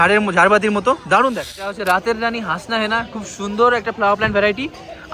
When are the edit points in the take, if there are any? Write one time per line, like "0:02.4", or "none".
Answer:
0:01.8

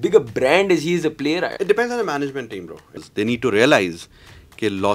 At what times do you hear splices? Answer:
0:01.5
0:03.0

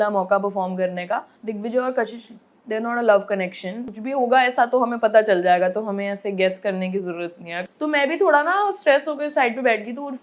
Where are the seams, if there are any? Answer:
0:01.4
0:03.8
0:07.5

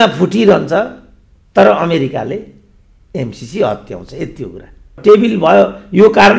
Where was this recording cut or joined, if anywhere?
0:05.0

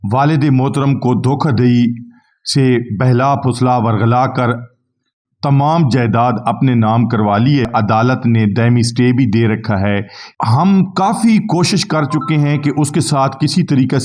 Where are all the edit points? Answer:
0:07.7
0:10.2

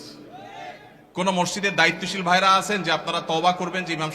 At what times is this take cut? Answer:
0:00.9

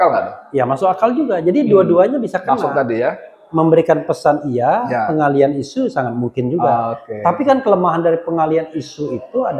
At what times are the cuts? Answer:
none

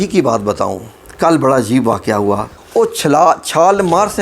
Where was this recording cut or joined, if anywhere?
0:02.5

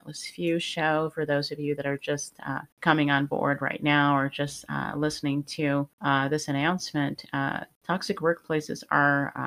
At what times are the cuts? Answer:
0:02.7
0:05.9
0:07.7

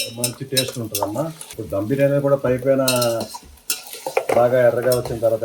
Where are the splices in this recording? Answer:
none

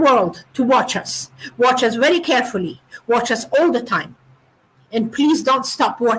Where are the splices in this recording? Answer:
none

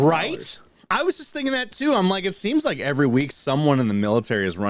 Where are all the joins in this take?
none

